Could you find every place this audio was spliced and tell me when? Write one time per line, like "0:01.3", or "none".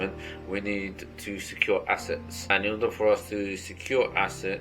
0:02.3